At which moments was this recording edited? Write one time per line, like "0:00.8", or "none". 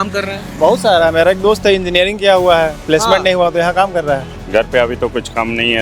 0:04.3